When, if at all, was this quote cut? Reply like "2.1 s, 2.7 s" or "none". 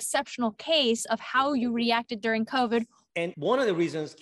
3.1 s